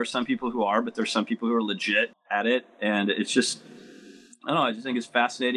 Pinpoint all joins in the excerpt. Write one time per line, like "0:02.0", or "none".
0:02.2